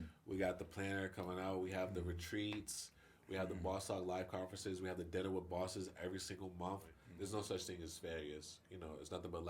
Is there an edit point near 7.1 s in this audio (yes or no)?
yes